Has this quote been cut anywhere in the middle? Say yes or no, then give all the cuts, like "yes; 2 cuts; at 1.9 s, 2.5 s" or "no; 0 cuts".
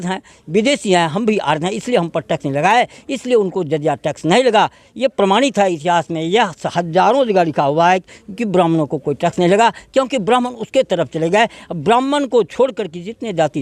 no; 0 cuts